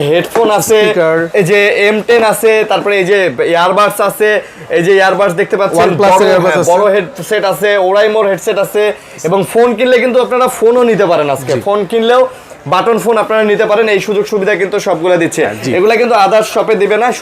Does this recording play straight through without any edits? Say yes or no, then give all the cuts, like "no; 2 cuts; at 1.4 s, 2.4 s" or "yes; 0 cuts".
yes; 0 cuts